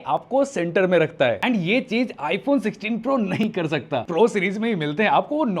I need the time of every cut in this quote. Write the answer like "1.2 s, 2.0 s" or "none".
1.4 s, 4.0 s